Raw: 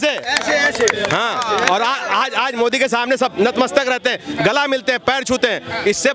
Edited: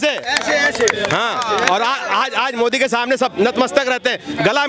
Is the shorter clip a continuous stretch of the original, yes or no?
yes